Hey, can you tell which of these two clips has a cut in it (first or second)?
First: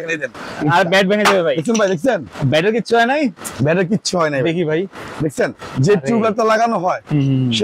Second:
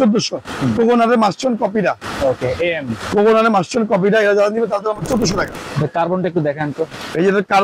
second